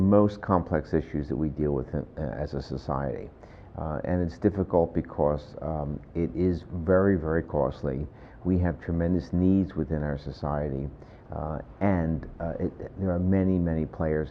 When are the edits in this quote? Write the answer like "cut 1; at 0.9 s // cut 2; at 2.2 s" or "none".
cut 1; at 1.7 s